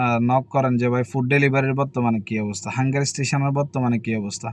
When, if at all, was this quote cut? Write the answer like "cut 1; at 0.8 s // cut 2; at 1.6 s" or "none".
none